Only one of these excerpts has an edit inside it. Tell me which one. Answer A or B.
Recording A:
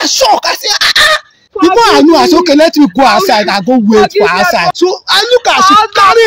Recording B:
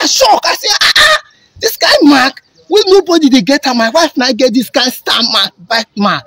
A